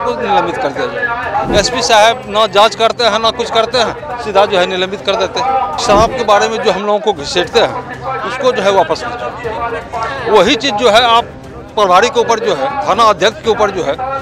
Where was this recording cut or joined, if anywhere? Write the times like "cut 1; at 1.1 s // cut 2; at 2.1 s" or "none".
cut 1; at 1.2 s // cut 2; at 5.8 s